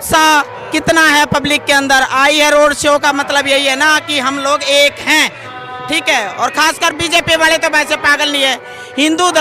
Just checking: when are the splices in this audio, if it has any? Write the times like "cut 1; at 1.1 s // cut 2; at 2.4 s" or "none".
cut 1; at 5.4 s